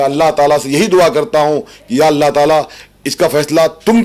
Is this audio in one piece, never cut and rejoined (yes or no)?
yes